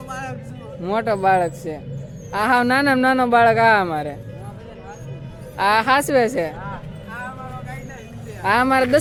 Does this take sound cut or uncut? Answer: uncut